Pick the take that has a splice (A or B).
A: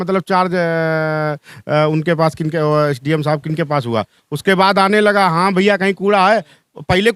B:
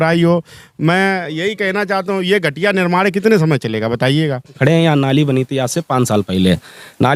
B